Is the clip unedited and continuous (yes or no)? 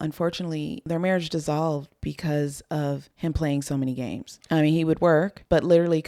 yes